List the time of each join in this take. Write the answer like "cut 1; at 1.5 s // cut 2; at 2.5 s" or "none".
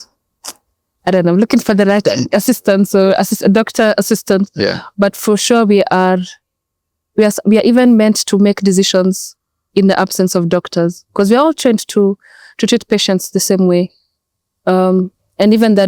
none